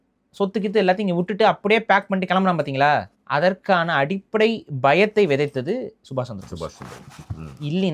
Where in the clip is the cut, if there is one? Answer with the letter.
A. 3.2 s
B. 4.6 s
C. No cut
A